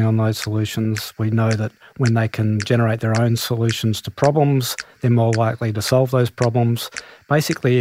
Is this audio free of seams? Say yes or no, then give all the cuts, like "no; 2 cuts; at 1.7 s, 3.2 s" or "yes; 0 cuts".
yes; 0 cuts